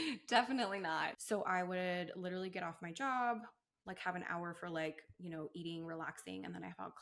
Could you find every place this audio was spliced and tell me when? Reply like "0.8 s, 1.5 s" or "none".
1.2 s